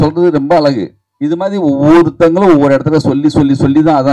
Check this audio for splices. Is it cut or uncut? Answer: uncut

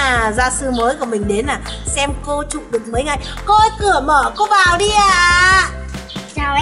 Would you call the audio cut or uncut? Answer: uncut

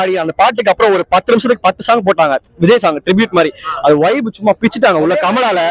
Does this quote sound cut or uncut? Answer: uncut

